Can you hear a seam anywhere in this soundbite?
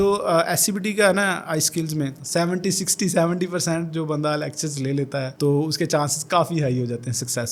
no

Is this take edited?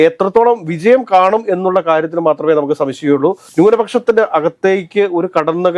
yes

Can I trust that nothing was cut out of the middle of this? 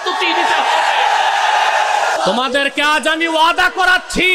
no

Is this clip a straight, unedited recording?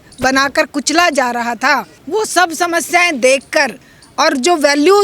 no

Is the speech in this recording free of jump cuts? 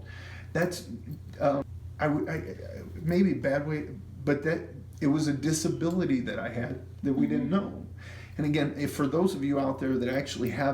no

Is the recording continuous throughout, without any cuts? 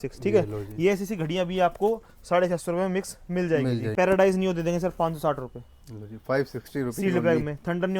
no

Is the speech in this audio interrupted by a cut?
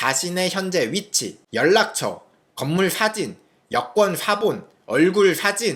no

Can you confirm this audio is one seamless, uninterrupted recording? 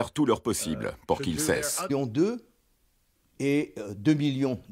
yes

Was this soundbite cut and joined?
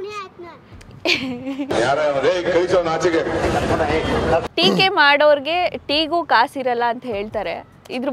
yes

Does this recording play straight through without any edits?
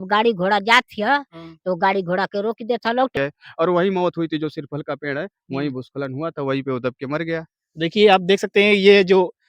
no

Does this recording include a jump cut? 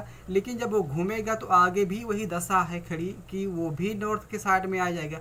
no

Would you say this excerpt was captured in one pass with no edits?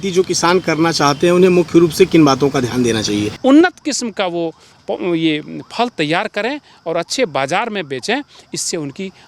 no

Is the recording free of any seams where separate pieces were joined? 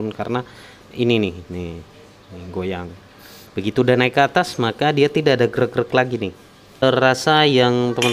no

